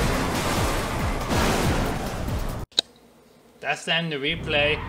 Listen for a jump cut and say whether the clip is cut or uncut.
cut